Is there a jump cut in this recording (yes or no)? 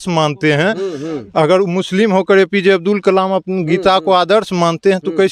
no